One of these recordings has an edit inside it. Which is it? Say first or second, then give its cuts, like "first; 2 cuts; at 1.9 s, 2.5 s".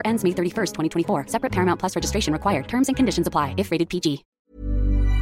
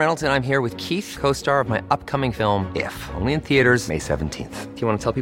first; 1 cut; at 4.3 s